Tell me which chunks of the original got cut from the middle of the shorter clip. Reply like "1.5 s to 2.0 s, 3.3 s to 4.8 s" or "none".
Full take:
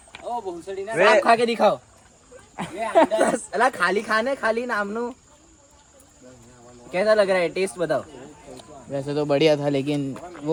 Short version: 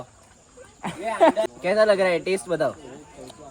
3.2 s to 6.7 s